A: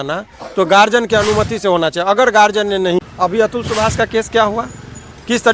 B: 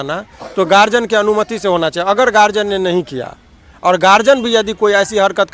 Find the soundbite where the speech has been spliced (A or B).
A